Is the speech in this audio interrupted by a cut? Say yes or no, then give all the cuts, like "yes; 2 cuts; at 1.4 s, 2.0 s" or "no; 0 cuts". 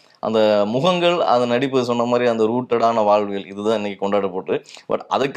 no; 0 cuts